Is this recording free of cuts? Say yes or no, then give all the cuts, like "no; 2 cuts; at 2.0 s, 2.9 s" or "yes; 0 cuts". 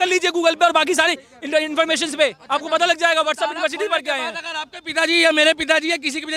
yes; 0 cuts